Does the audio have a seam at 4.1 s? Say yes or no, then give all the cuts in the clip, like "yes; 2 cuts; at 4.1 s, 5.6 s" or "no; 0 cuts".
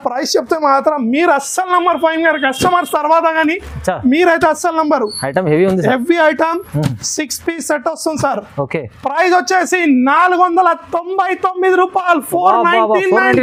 no; 0 cuts